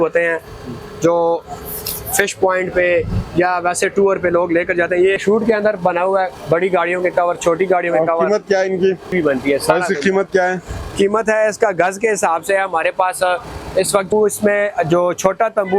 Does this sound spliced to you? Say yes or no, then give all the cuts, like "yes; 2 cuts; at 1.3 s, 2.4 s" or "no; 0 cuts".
yes; 3 cuts; at 5.2 s, 9.1 s, 14.1 s